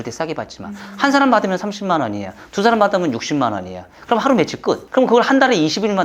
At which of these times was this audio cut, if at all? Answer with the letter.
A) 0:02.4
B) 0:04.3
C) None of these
C